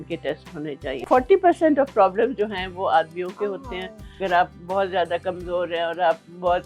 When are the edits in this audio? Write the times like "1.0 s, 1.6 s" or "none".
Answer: 1.0 s, 4.2 s